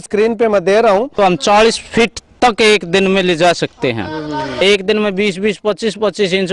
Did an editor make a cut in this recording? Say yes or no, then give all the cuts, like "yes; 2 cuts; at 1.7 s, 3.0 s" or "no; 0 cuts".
yes; 2 cuts; at 1.1 s, 4.6 s